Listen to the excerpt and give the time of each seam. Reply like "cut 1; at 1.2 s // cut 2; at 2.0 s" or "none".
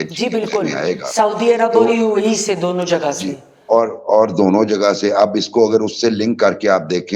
none